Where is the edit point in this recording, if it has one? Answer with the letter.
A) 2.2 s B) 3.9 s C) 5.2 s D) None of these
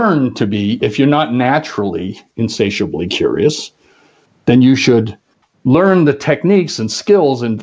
D